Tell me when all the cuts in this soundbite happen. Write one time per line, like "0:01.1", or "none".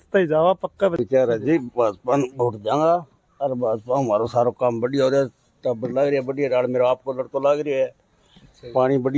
0:01.0